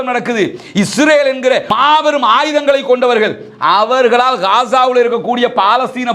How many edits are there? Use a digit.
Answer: 1